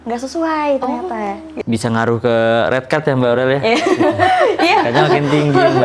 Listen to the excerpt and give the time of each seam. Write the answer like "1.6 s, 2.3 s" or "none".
1.5 s